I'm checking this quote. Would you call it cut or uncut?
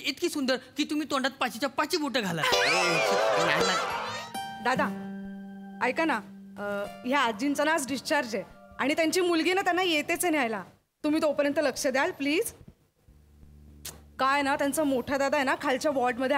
cut